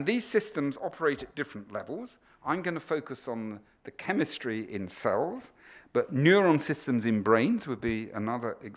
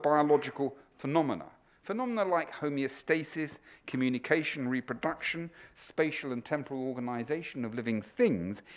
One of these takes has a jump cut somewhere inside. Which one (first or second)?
second